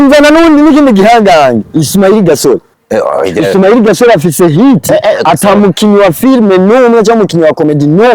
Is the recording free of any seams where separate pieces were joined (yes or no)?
no